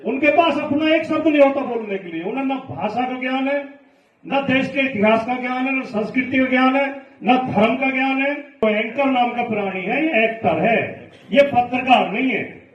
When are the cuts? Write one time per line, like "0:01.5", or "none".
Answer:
0:08.6